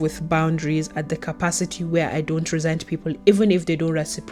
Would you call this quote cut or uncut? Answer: uncut